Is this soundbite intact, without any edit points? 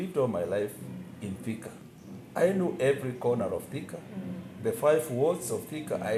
yes; 0 cuts

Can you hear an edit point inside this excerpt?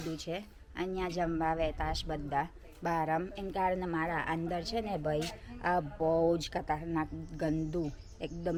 no; 0 cuts

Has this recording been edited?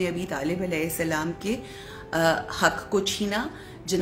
no; 0 cuts

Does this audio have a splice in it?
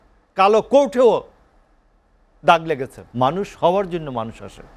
yes; 1 cut; at 3.0 s

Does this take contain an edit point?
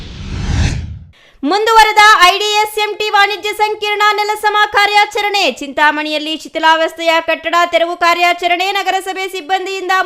no; 0 cuts

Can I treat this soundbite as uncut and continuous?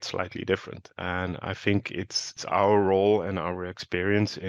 no; 1 cut; at 2.4 s

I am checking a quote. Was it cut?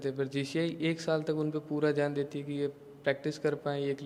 no; 0 cuts

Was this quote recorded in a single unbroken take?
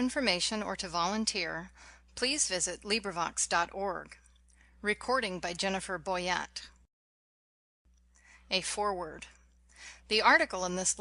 yes; 0 cuts

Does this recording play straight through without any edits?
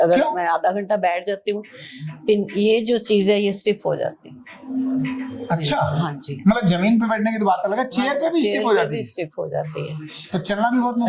yes; 0 cuts

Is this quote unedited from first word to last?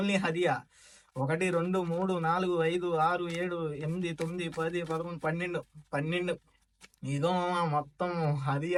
yes; 0 cuts

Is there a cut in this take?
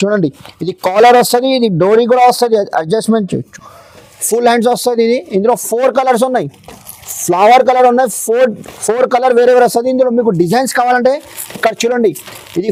no; 0 cuts

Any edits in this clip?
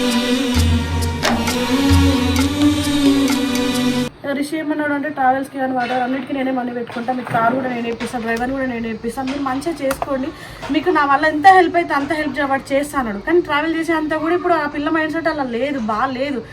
yes; 1 cut; at 4.2 s

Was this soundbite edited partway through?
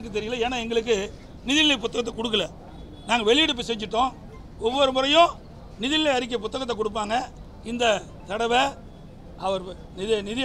no; 0 cuts

